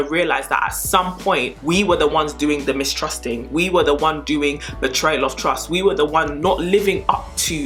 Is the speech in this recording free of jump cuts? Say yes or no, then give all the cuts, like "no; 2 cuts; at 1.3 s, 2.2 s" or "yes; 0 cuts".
yes; 0 cuts